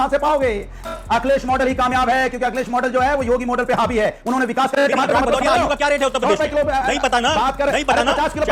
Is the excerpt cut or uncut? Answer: cut